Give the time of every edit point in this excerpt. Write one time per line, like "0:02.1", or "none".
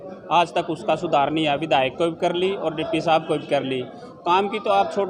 none